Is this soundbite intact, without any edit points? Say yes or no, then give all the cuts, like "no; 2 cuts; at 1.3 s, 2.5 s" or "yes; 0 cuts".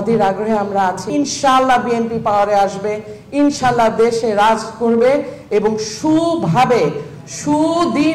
no; 1 cut; at 1.1 s